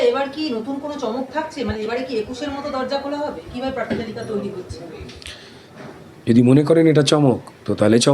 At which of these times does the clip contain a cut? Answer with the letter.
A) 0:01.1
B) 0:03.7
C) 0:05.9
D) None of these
C